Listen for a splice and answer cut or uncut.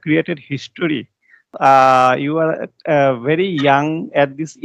cut